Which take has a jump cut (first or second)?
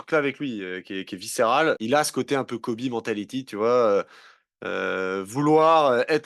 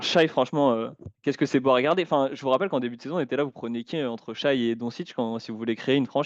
first